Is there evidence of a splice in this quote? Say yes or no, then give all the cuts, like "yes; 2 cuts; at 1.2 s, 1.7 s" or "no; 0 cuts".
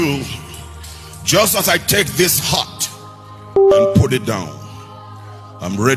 no; 0 cuts